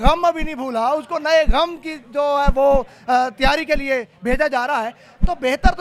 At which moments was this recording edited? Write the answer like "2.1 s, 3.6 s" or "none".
none